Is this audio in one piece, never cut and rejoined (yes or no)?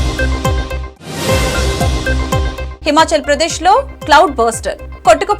no